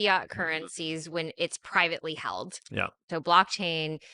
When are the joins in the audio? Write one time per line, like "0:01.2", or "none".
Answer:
0:03.1